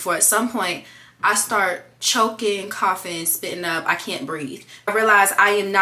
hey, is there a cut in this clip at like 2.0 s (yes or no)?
no